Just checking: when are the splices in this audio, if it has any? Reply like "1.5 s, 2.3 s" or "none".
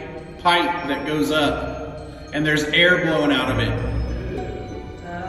none

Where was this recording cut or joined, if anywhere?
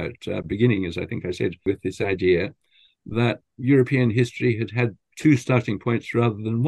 1.6 s, 3.5 s, 5.0 s

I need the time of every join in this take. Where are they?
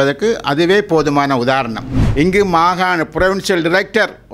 1.9 s

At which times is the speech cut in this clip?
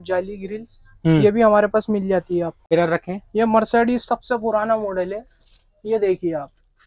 2.6 s

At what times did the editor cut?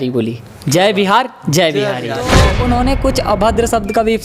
2.5 s

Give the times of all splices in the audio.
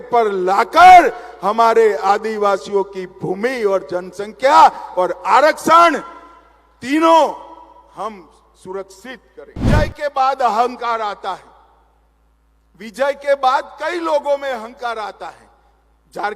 9.6 s

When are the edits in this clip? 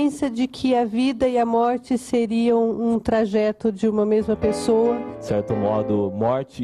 5.1 s

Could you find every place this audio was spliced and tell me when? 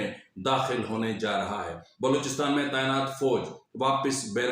1.8 s

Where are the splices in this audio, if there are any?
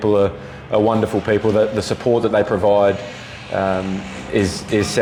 none

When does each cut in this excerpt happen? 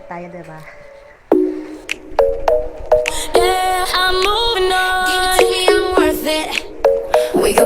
1.1 s

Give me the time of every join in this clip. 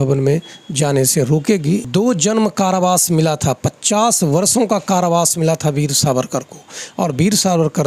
1.9 s

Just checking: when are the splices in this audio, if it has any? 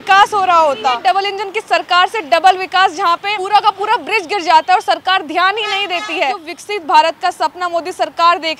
1.0 s, 3.3 s, 6.5 s

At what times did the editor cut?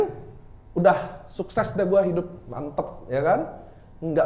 none

